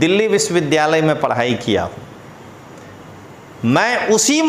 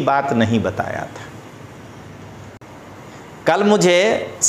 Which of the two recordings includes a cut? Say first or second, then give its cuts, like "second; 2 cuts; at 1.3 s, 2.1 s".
second; 1 cut; at 2.6 s